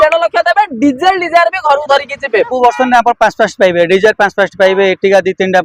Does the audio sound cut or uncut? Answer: cut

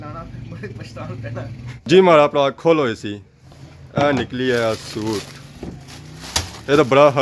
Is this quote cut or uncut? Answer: cut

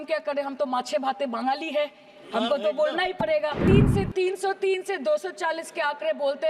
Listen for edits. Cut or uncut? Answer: cut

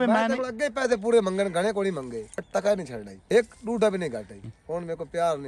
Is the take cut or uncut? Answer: cut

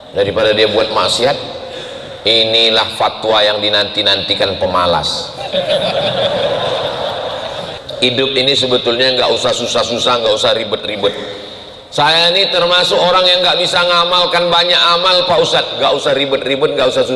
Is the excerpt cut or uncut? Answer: cut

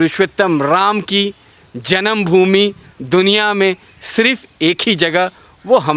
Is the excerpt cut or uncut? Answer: uncut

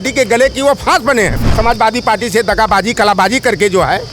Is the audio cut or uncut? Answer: cut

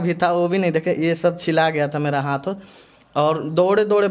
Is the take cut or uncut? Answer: uncut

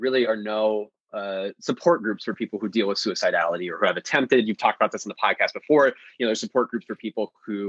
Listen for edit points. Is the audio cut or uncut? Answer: uncut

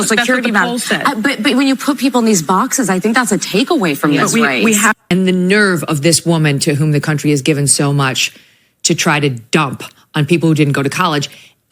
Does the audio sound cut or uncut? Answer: cut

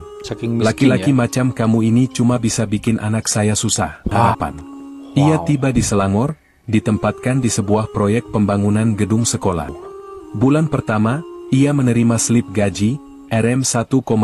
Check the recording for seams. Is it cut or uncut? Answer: cut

